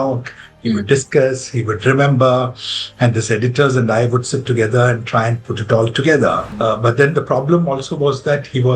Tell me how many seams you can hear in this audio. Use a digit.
1